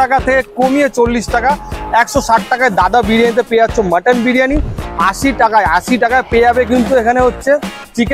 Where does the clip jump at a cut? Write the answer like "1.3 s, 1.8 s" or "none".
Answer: 4.9 s